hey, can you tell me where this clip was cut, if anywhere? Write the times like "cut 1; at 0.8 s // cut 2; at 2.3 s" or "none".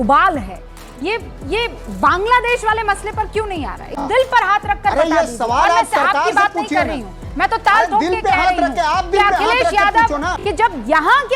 cut 1; at 4.1 s // cut 2; at 10.3 s